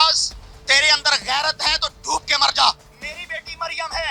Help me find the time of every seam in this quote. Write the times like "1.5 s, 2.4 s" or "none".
none